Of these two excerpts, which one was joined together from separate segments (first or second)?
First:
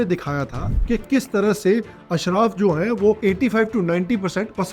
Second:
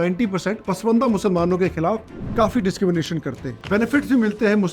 second